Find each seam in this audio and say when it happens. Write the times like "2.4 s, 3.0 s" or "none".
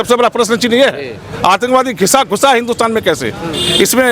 none